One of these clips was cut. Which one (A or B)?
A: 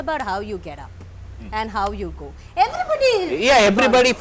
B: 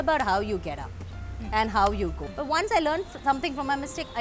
B